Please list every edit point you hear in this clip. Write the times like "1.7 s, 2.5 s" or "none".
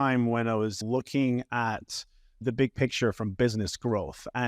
2.4 s